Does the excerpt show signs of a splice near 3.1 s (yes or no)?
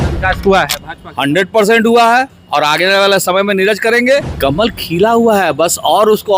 no